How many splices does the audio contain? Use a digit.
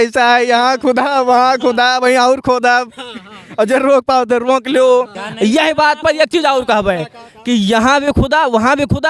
1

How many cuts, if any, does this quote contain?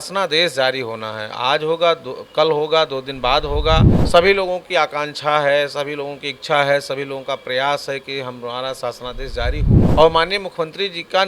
2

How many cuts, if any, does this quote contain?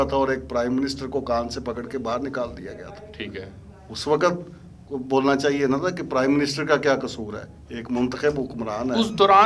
0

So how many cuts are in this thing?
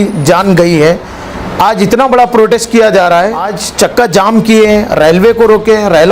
1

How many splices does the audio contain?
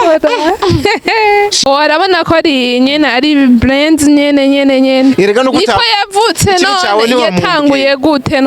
1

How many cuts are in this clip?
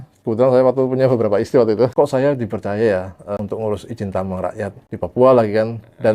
3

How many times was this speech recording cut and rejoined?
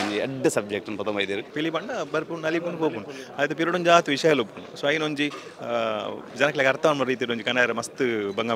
1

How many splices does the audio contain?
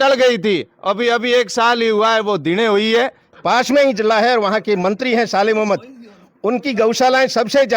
1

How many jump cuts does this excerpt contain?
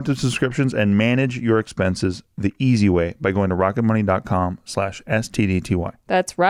0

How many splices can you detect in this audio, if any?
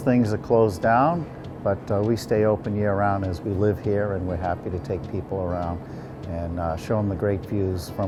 0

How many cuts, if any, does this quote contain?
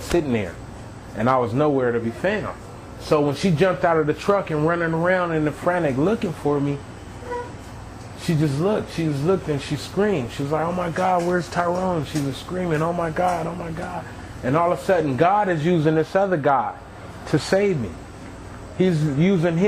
1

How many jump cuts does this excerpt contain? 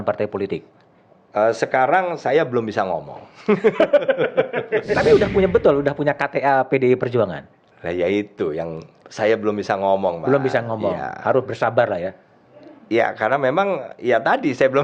1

